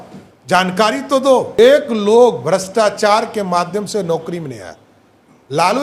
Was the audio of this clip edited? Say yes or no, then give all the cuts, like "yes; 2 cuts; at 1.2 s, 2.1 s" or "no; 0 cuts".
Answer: yes; 1 cut; at 1.5 s